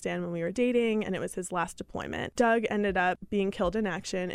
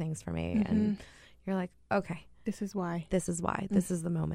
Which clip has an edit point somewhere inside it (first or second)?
first